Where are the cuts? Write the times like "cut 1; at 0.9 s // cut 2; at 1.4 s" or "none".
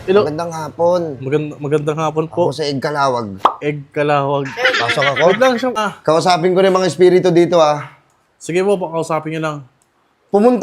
cut 1; at 5.8 s